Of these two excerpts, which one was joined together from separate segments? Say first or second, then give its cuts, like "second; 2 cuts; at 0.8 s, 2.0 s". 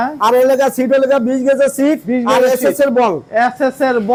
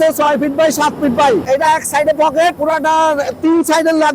second; 2 cuts; at 1.4 s, 2.6 s